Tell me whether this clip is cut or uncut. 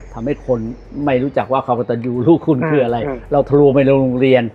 uncut